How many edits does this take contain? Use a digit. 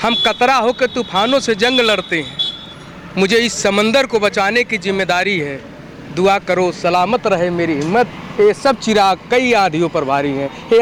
0